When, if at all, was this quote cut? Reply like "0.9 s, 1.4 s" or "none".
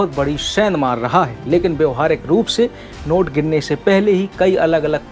1.4 s